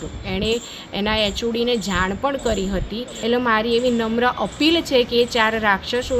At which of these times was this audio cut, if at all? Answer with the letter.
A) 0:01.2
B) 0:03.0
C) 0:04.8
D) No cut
B